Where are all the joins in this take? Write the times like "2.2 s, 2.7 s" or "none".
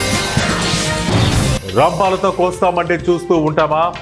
1.6 s